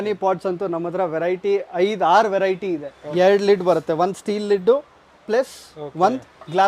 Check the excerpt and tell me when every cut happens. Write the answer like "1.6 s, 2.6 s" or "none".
3.0 s